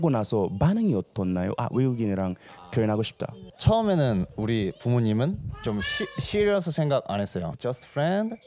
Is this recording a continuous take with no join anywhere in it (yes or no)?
no